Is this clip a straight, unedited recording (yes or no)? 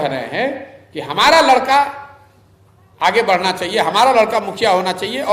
yes